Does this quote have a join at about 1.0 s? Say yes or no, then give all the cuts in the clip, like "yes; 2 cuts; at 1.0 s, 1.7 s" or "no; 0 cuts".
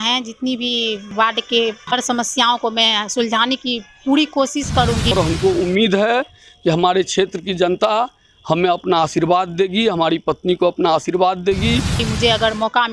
yes; 4 cuts; at 1.0 s, 1.8 s, 5.1 s, 12.0 s